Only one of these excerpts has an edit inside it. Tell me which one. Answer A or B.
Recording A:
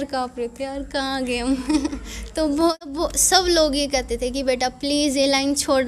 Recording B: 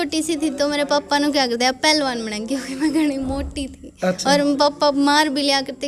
A